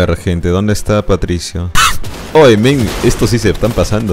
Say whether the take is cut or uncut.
cut